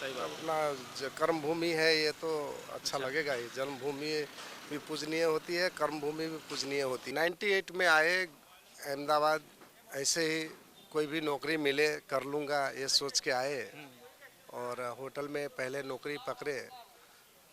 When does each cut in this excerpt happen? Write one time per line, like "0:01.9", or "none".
0:07.1